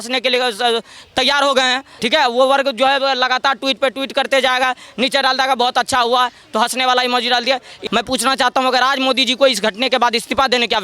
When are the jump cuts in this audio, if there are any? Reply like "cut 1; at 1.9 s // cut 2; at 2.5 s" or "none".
cut 1; at 7.7 s

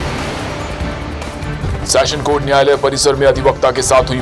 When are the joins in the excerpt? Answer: cut 1; at 1.2 s

